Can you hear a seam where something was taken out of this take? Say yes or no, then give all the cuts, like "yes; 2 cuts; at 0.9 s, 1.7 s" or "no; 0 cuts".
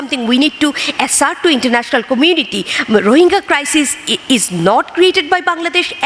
no; 0 cuts